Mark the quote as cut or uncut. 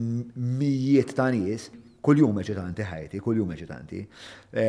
cut